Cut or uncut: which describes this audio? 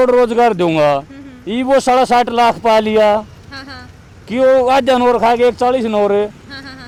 uncut